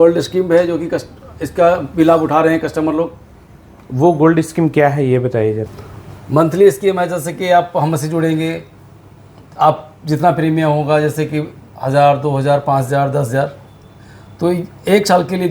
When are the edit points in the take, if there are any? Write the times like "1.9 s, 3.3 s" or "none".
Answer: 5.7 s